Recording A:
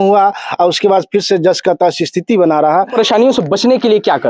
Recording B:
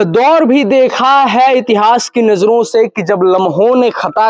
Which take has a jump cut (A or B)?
A